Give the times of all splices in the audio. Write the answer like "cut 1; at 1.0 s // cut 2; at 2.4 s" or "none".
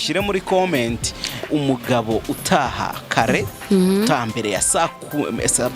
cut 1; at 1.5 s